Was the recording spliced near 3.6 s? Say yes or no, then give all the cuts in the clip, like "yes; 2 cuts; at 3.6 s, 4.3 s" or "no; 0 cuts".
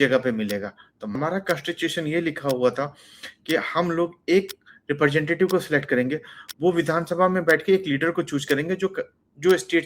no; 1 cut; at 1.1 s